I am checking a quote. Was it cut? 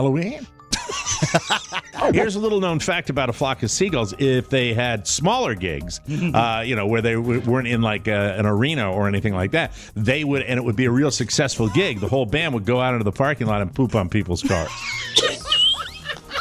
yes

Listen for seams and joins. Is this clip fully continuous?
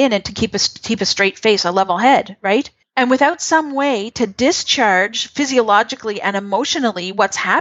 no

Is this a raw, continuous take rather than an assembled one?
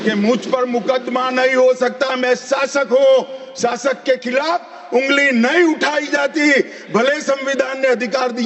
yes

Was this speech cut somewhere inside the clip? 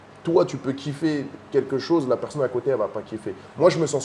no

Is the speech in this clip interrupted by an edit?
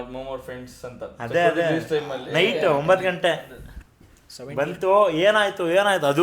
no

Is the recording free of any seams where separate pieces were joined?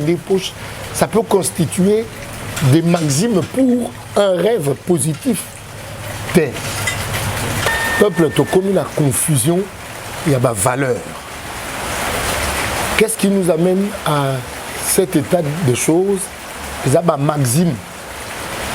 no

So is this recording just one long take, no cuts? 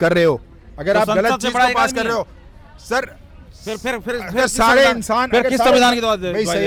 yes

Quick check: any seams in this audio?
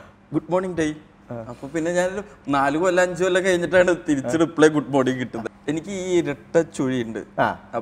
yes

